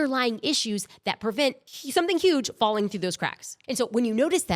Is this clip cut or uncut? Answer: cut